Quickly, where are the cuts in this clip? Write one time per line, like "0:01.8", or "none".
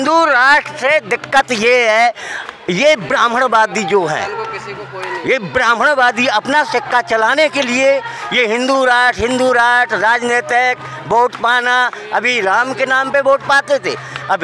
none

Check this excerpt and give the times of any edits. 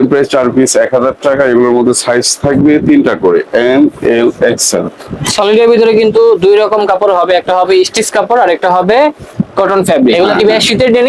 0:10.1

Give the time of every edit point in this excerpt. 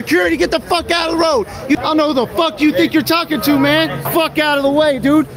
0:01.8
0:04.1

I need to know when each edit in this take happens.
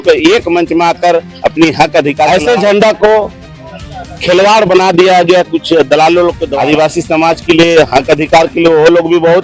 0:02.3
0:06.5

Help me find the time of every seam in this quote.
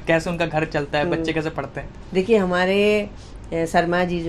none

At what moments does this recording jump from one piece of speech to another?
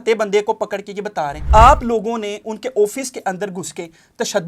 0:01.4

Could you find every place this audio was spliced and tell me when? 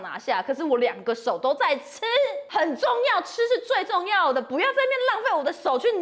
0:02.4

